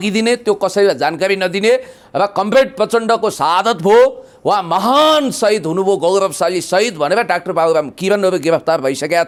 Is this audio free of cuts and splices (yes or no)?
yes